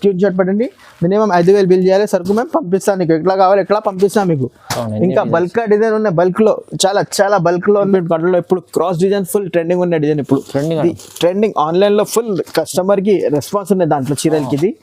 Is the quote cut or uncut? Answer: cut